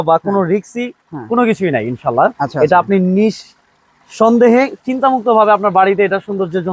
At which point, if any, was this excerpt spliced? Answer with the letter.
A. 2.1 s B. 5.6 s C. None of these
C